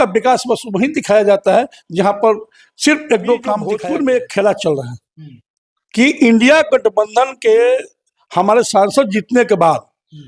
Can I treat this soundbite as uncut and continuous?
no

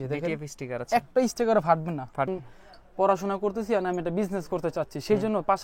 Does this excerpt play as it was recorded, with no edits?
no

